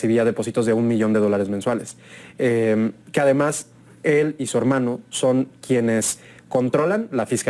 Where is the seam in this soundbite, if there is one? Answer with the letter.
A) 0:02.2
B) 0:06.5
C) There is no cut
C